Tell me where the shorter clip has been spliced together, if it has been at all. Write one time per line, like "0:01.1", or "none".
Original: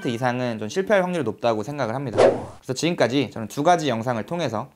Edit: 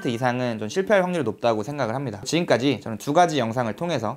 0:02.0

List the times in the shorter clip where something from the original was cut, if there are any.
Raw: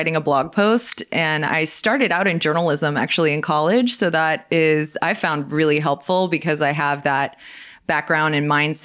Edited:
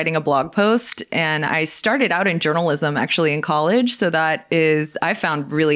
none

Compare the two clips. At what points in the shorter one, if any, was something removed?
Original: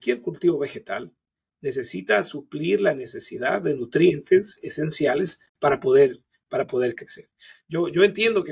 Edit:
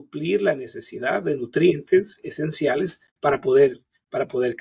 none

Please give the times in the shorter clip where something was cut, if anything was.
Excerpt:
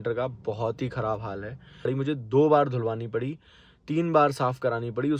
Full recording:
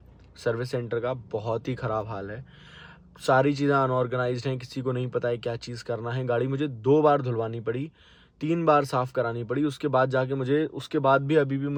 0:01.9

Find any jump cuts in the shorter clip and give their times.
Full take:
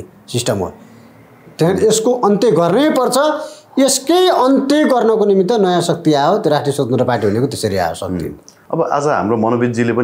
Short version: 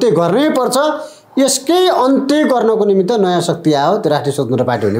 none

